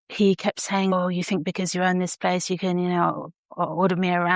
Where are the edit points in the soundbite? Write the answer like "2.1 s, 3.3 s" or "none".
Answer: 0.9 s